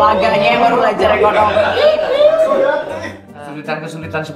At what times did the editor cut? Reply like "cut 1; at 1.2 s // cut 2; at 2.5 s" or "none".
cut 1; at 3.3 s